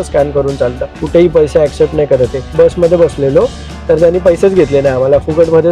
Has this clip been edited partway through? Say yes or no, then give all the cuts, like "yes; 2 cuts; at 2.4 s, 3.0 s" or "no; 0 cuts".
yes; 2 cuts; at 0.9 s, 2.5 s